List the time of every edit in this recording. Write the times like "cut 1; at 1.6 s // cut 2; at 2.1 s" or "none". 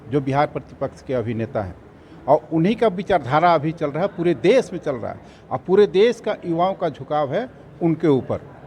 none